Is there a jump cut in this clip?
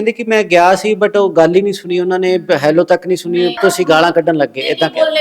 yes; 1 cut; at 3.5 s

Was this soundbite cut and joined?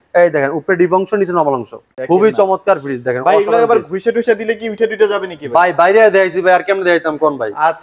yes; 1 cut; at 1.9 s

